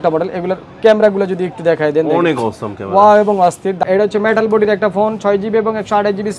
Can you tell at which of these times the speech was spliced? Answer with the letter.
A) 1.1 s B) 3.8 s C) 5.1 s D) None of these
B